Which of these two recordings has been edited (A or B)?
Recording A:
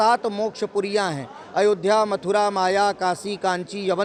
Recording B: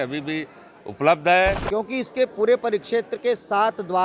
B